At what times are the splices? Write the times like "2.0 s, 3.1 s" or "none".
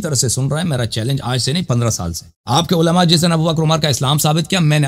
none